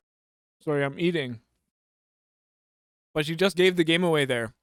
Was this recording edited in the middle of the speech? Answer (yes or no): no